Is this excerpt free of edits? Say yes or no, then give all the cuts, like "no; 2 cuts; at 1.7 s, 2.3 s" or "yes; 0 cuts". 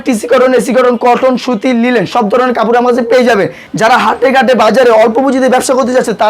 no; 1 cut; at 3.6 s